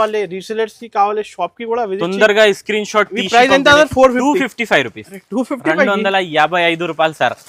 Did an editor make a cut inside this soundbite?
no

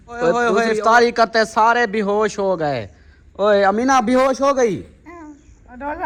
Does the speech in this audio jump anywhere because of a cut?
no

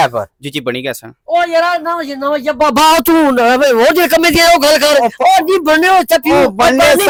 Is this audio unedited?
yes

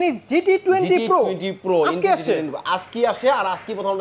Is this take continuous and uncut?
yes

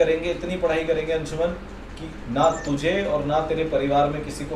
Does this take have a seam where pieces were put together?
no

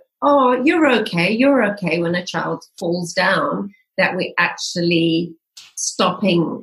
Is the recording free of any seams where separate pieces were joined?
yes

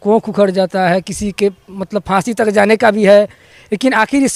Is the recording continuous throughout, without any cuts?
yes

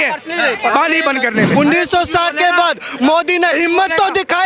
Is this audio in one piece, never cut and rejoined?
no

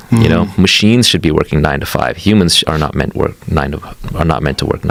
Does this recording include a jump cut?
no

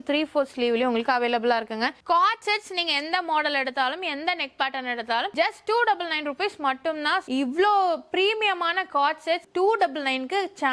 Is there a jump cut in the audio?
yes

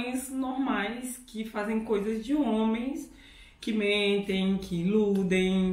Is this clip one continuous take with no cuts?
yes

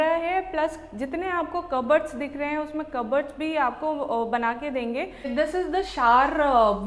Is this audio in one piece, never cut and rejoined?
no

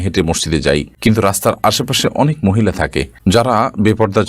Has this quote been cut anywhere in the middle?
yes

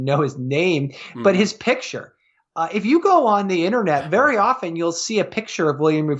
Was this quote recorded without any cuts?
yes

